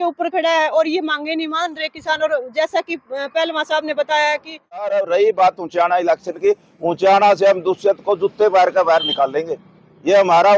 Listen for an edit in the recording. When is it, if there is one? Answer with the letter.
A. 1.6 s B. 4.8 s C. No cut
B